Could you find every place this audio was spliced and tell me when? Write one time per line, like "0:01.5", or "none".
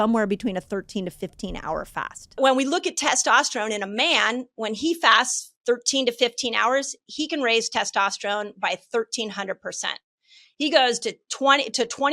0:02.4
0:10.4